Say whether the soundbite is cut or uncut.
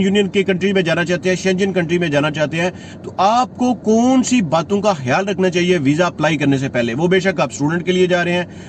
uncut